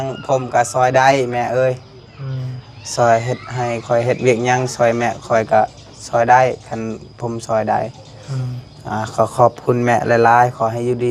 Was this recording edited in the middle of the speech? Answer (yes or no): no